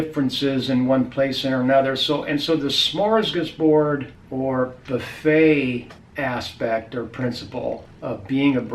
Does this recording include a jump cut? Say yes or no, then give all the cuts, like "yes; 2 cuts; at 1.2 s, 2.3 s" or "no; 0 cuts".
yes; 3 cuts; at 4.2 s, 6.0 s, 7.9 s